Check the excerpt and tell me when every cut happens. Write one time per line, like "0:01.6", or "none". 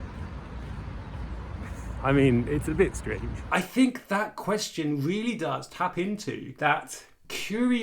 0:03.4